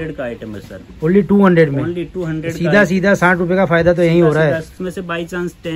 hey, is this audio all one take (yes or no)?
no